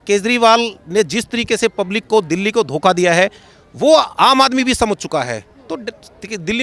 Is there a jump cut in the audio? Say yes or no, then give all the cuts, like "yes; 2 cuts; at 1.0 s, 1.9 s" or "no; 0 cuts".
no; 0 cuts